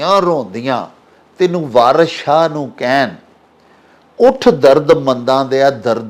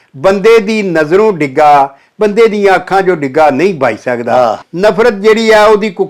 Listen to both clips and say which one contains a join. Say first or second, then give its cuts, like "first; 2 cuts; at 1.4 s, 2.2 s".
second; 1 cut; at 4.6 s